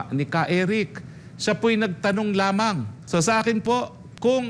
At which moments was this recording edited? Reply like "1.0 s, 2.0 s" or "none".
2.9 s